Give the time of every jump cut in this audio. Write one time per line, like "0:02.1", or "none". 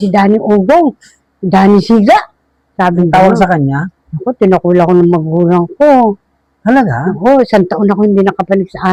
none